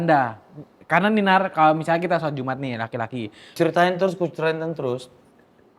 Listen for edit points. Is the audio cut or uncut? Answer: cut